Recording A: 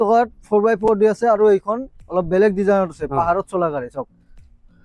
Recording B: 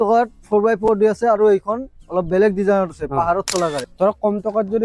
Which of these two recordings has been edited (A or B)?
B